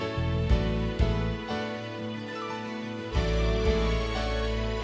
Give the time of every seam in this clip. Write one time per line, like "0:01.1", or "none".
none